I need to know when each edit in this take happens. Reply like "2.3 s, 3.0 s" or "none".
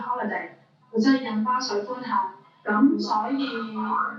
2.5 s